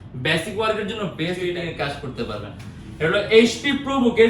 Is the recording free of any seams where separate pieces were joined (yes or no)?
no